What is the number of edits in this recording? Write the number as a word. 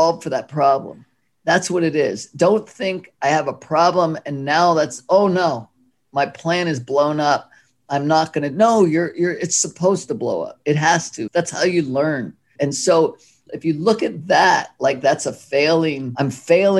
three